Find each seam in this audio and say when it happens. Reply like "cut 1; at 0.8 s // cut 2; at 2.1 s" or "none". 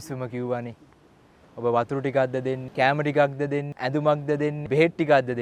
cut 1; at 2.7 s // cut 2; at 3.7 s // cut 3; at 4.6 s